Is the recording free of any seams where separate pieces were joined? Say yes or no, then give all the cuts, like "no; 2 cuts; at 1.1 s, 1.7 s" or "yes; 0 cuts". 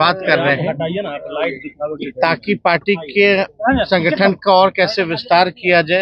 yes; 0 cuts